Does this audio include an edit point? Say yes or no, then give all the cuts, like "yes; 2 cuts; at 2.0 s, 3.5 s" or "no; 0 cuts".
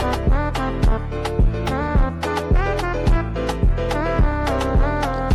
no; 0 cuts